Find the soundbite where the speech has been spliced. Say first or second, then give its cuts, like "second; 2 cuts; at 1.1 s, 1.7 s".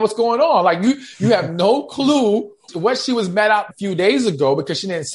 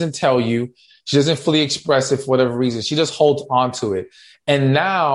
first; 2 cuts; at 2.6 s, 3.7 s